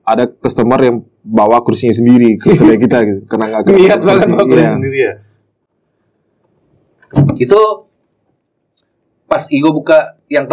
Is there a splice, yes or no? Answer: no